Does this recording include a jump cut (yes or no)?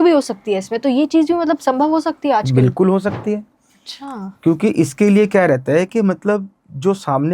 no